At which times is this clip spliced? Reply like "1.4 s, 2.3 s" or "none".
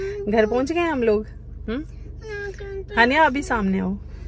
none